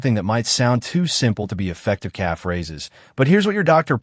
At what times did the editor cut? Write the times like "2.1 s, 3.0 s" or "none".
1.3 s